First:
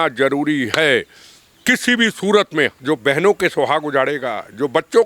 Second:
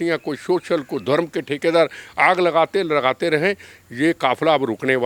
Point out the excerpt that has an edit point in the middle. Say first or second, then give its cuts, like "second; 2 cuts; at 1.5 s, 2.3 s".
first; 1 cut; at 2.8 s